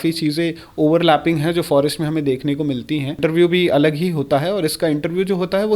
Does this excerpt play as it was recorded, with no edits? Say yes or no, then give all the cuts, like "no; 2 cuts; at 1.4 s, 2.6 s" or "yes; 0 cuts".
no; 1 cut; at 3.2 s